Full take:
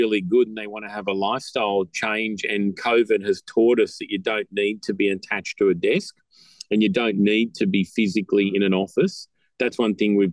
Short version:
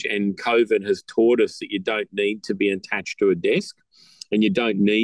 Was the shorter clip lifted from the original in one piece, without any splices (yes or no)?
yes